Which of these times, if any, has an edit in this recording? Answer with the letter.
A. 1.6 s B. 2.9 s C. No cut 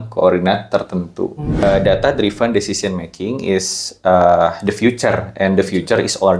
A